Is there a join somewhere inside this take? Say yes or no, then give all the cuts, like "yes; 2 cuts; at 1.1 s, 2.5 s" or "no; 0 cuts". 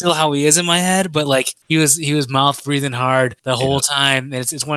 yes; 2 cuts; at 1.6 s, 3.4 s